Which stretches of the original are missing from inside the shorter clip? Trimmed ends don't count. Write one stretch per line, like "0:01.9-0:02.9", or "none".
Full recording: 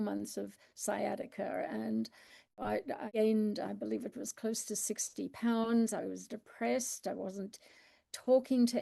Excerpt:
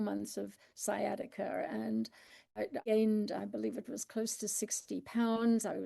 0:02.6-0:02.9